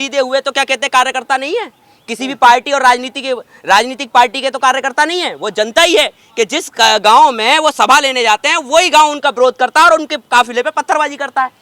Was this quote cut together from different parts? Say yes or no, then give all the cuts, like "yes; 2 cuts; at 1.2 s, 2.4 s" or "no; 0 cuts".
no; 0 cuts